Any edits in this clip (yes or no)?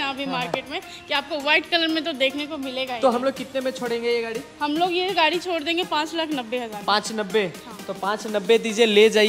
no